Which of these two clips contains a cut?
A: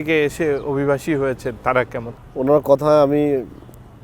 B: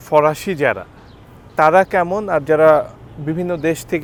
A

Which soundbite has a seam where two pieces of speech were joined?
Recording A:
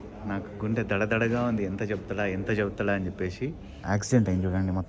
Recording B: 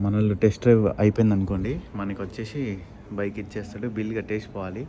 A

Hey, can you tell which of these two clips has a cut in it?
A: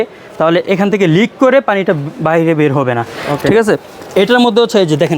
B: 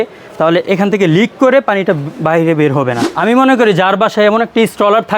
B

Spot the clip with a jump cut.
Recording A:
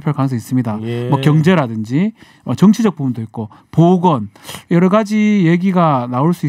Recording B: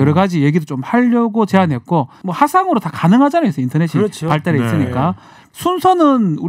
B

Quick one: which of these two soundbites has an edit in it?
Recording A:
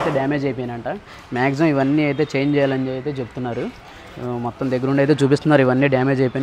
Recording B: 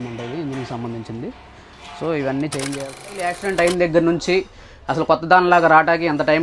B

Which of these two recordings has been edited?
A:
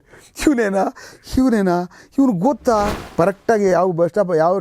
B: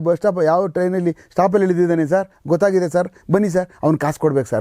A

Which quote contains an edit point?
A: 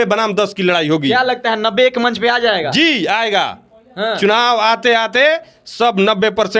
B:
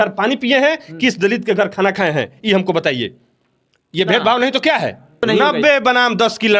B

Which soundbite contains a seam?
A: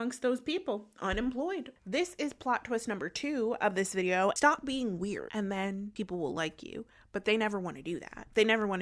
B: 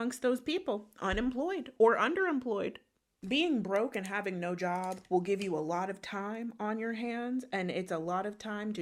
A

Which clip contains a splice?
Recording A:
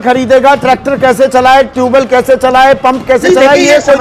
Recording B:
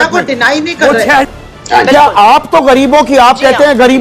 B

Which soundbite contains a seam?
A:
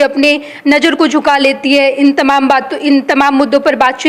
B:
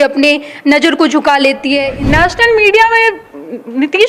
B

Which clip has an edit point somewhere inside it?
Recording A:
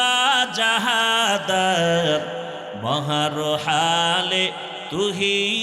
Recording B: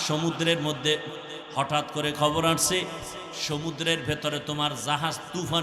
B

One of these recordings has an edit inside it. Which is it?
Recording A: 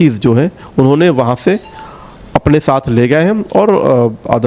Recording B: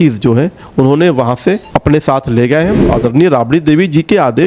B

